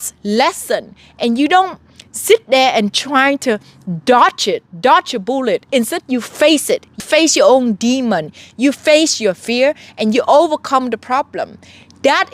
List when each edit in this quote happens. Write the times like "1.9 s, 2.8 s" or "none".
7.0 s